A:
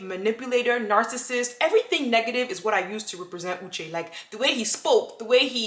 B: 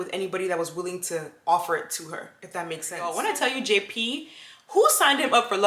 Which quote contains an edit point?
B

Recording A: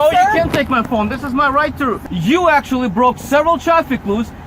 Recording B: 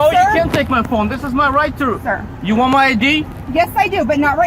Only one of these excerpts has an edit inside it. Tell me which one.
A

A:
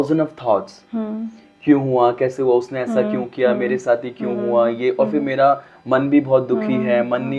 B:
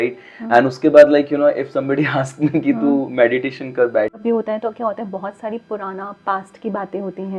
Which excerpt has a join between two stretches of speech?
B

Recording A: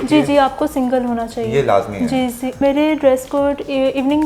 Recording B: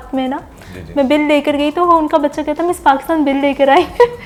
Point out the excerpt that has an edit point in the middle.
A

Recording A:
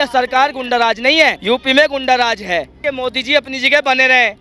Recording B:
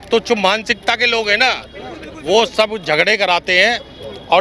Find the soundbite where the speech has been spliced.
A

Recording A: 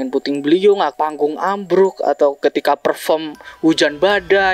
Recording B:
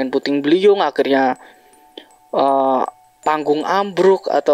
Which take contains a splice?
A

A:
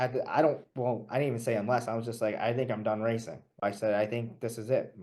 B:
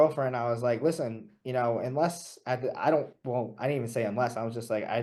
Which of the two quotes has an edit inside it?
A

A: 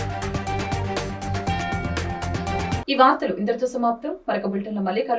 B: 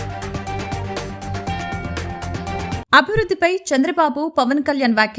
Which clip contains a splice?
B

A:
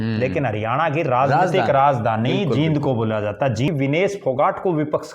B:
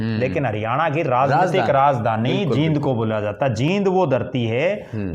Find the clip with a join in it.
A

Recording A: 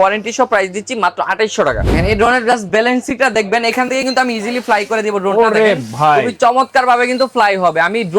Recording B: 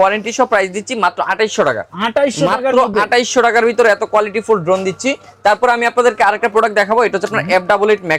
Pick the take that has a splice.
A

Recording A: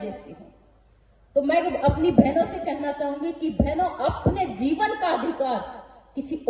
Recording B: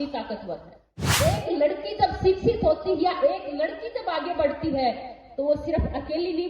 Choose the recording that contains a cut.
B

